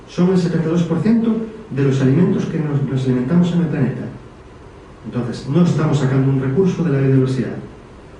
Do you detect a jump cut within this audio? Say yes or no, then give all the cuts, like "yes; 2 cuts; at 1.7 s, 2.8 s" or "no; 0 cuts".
no; 0 cuts